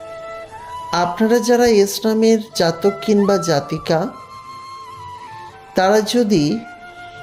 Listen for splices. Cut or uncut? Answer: cut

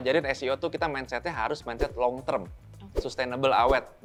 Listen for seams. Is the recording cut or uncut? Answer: uncut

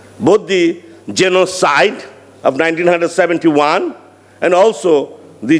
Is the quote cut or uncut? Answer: uncut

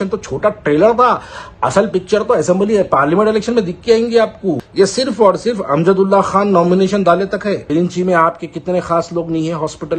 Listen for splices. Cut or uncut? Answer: cut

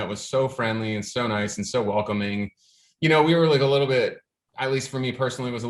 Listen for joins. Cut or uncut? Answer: uncut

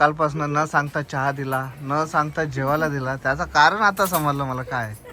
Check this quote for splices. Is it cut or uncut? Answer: uncut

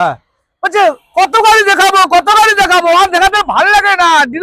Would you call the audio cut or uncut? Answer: uncut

